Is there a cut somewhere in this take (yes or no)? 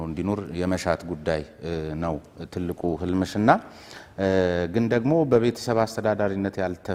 no